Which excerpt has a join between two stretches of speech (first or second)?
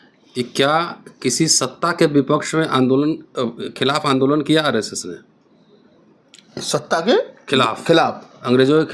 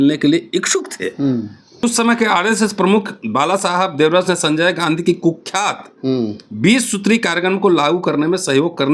second